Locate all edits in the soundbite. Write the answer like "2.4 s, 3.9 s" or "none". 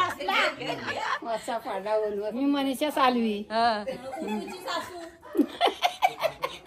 2.3 s